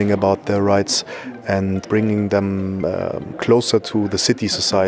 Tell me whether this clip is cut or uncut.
cut